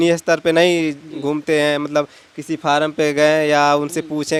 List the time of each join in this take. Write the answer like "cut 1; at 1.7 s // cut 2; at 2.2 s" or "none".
none